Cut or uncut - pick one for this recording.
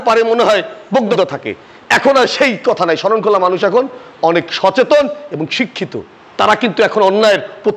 cut